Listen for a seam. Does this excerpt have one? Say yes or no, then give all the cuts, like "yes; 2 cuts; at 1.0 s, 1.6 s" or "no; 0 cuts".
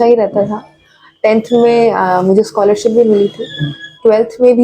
no; 0 cuts